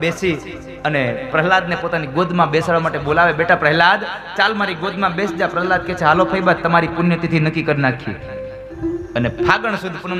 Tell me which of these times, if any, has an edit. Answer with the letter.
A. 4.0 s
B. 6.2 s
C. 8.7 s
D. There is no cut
C